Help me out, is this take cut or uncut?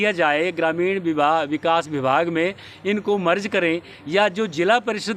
uncut